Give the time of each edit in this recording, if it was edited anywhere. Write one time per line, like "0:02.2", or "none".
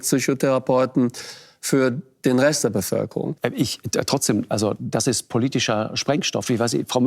0:03.4